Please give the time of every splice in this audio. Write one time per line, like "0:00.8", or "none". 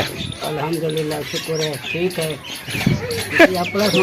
0:02.7